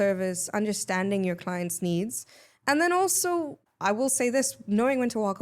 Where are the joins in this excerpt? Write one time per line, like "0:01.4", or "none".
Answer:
0:03.6